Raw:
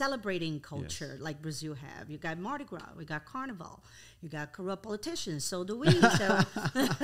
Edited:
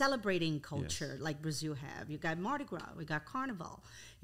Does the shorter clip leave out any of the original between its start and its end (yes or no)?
no